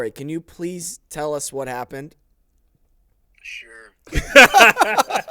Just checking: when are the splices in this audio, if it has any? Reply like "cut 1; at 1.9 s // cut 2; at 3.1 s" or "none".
cut 1; at 2.2 s